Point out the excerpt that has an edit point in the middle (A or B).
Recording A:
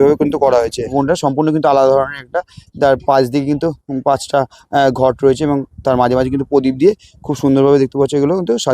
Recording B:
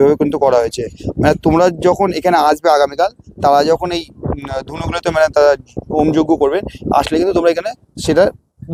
A